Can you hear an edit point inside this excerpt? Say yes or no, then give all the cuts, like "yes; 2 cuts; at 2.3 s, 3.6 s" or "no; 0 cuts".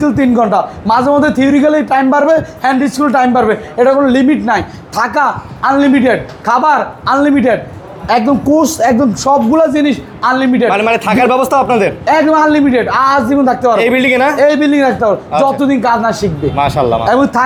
no; 0 cuts